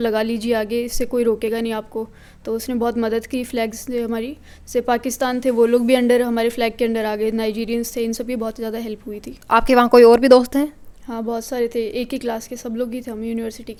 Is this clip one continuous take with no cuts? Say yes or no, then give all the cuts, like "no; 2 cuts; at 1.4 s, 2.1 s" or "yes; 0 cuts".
yes; 0 cuts